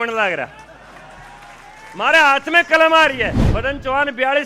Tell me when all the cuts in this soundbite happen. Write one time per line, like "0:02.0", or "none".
0:03.4